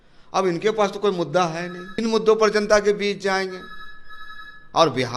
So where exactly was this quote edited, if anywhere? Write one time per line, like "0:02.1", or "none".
0:01.8